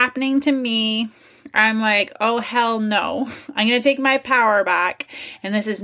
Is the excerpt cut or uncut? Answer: uncut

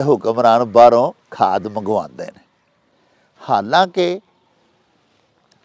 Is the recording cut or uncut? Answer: uncut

